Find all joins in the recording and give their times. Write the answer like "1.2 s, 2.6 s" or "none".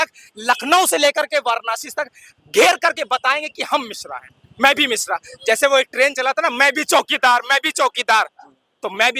none

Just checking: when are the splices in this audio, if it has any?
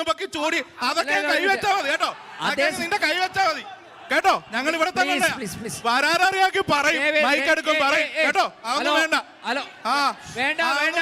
none

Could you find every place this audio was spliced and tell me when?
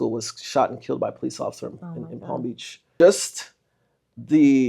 2.9 s

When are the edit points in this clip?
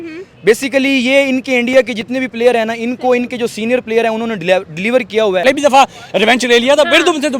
5.4 s

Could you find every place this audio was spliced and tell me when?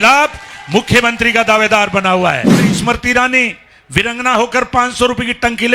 2.7 s

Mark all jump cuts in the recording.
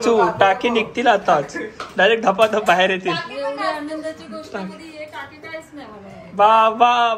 6.3 s

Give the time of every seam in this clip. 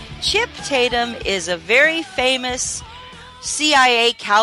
3.0 s

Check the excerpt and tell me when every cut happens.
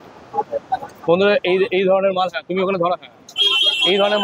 none

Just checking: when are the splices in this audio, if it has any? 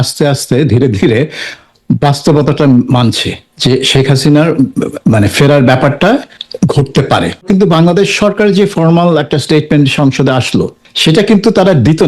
6.4 s, 7.5 s, 10.8 s

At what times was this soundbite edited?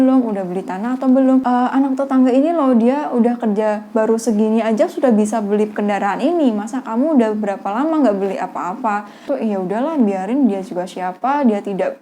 1.4 s, 9.3 s

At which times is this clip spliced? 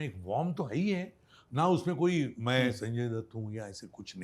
2.4 s

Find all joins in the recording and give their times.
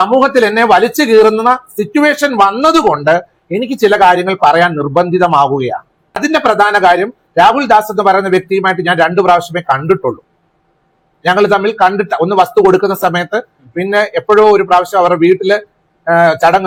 none

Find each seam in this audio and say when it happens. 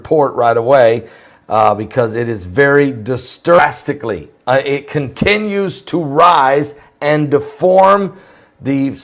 none

